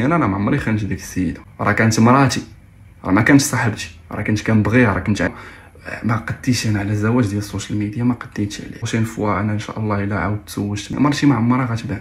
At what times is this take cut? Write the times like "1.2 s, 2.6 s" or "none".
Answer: 1.5 s, 5.3 s, 8.8 s, 10.9 s